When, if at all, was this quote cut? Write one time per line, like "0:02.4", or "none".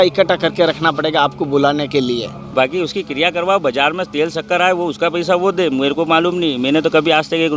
0:02.4